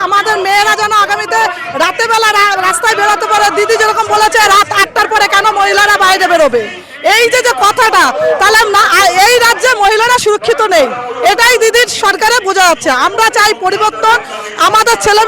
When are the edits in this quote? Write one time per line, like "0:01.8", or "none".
none